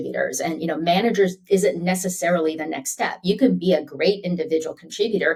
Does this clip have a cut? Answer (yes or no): no